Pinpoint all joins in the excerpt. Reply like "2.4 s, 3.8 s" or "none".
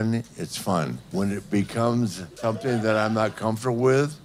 1.0 s, 2.3 s